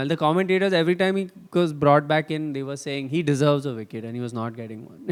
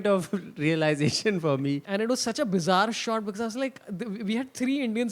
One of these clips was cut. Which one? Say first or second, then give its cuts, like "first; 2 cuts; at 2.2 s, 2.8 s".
second; 1 cut; at 1.8 s